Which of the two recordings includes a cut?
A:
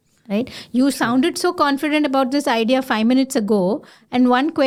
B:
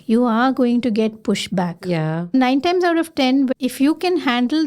B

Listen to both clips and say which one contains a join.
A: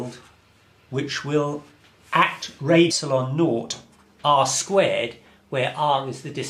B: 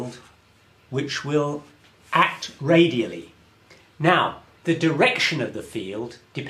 B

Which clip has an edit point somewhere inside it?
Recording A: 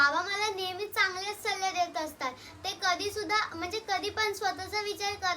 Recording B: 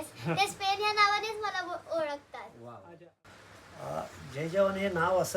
B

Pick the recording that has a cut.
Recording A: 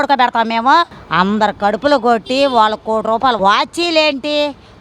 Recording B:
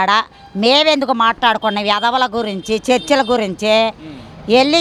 A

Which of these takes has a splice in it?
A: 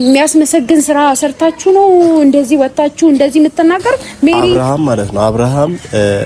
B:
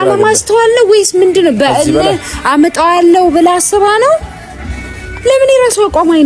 A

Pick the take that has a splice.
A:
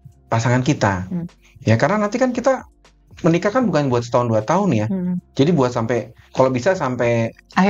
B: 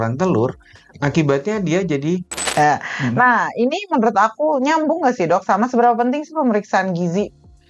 B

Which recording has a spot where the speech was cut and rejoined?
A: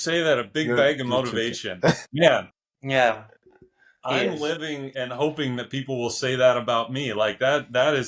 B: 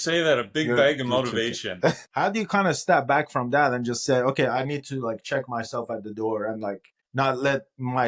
B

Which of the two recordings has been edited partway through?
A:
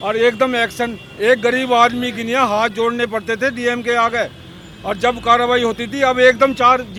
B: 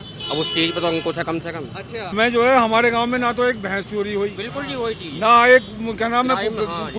B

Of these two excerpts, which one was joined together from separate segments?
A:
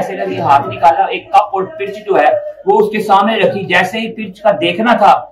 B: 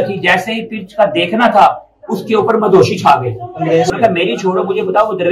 B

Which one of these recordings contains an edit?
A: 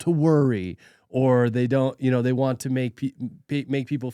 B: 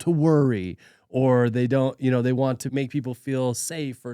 B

